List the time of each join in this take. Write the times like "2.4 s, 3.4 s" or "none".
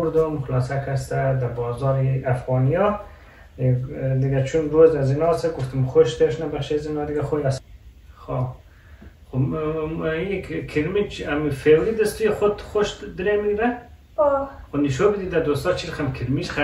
7.6 s